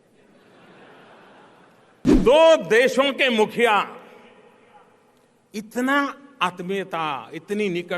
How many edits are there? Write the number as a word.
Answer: one